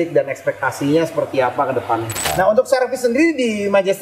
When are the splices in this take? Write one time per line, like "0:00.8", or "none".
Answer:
0:02.3